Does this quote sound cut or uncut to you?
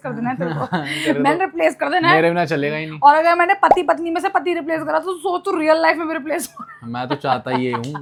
uncut